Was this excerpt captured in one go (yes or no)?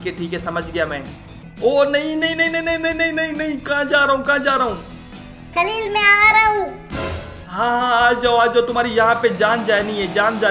no